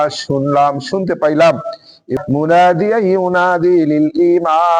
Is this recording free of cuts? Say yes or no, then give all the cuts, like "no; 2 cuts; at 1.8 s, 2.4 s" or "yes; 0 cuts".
no; 1 cut; at 2.2 s